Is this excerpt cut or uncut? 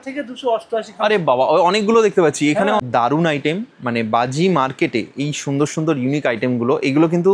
cut